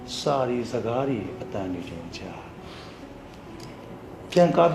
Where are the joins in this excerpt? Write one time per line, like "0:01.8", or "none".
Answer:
0:03.6